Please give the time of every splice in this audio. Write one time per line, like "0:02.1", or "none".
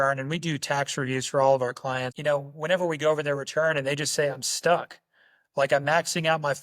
0:02.1